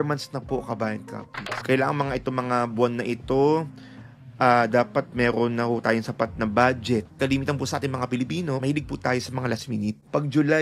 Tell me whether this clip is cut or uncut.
cut